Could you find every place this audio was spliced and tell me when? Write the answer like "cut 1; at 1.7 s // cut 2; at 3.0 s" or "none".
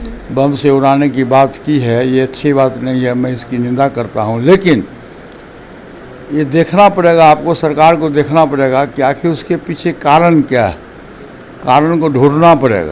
none